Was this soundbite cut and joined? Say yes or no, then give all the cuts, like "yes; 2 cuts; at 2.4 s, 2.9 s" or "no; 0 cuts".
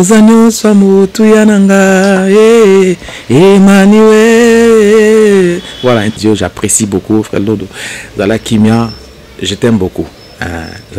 no; 0 cuts